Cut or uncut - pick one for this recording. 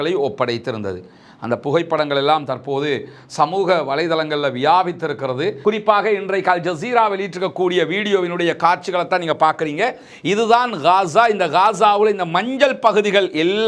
cut